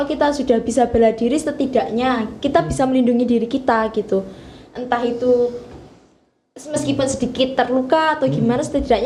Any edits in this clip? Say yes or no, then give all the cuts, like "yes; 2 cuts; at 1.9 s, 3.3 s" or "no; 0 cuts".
no; 0 cuts